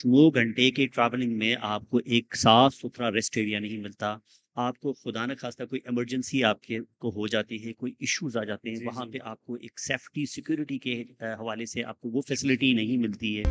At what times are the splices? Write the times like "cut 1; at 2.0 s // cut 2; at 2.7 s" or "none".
none